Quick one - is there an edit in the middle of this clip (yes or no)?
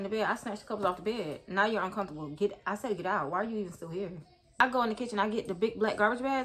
yes